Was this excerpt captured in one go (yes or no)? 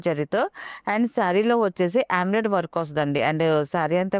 yes